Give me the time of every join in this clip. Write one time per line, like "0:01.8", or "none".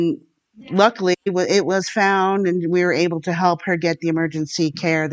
none